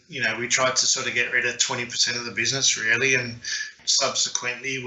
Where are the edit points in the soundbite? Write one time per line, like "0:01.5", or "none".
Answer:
0:03.8